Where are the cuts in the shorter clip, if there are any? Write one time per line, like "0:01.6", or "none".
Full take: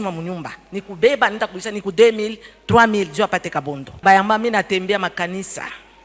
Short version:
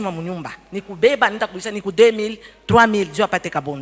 none